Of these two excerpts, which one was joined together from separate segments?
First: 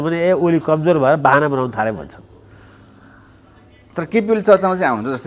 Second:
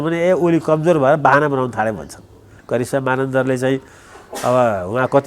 second; 1 cut; at 2.5 s

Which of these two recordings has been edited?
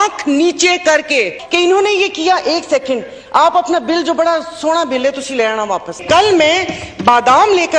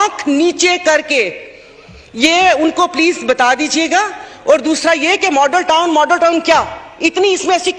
first; 2 cuts; at 1.4 s, 6.0 s

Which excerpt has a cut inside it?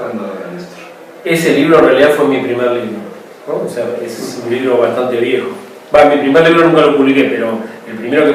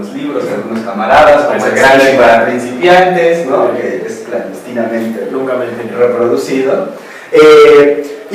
second; 1 cut; at 5.9 s

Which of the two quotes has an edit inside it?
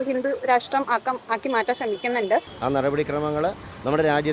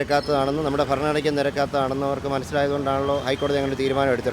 first; 1 cut; at 2.5 s

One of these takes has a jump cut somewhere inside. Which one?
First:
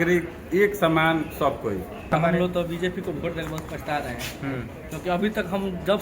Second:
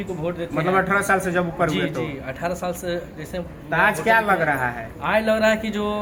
first; 1 cut; at 2.1 s

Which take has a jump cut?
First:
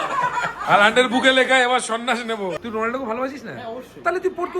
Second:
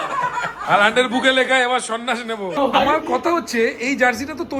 first; 1 cut; at 2.5 s

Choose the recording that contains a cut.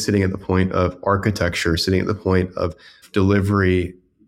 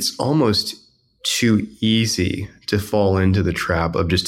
first; 1 cut; at 3.0 s

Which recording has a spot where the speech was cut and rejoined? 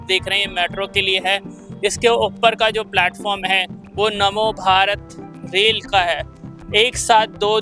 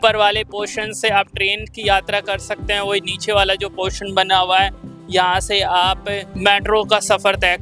second; 1 cut; at 6.3 s

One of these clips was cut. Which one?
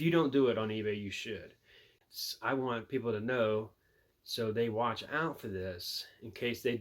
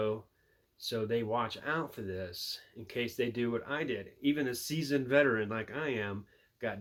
first; 1 cut; at 2.0 s

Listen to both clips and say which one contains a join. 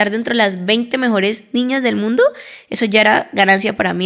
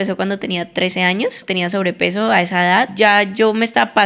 second; 2 cuts; at 1.4 s, 2.9 s

